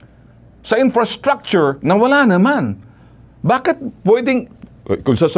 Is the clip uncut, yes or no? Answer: yes